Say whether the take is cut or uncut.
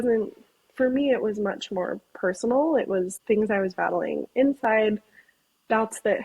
cut